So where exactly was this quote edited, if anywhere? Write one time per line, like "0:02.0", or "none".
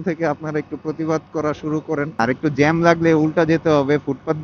0:02.1